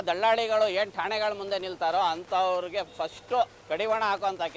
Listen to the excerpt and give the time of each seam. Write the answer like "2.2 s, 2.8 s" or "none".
3.6 s